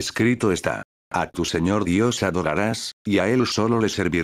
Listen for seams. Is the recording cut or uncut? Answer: cut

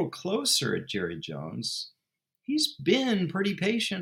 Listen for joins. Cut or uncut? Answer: uncut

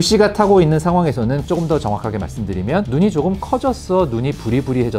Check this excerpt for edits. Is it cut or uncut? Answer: cut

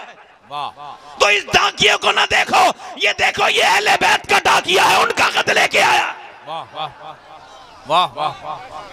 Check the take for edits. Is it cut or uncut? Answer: uncut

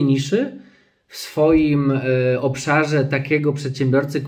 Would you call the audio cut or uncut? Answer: uncut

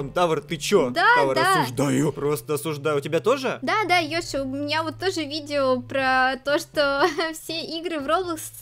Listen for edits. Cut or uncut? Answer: uncut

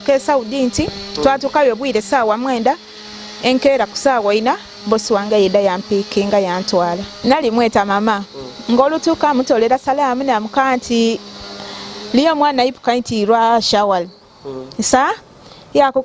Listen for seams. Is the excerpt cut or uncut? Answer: cut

